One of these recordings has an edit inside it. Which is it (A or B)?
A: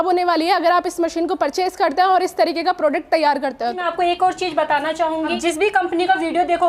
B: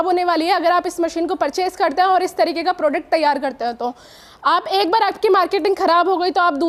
A